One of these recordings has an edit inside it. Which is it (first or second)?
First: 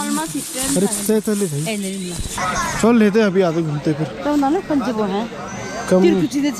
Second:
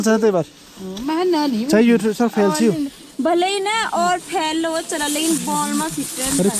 first